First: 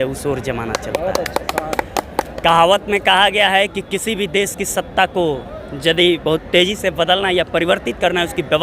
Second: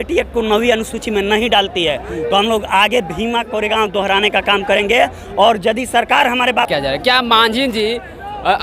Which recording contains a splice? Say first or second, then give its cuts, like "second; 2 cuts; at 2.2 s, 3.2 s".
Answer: second; 1 cut; at 6.7 s